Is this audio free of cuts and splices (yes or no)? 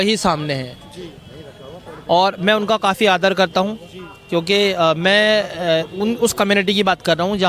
yes